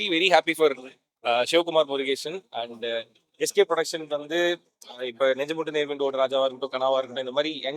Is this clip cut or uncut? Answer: uncut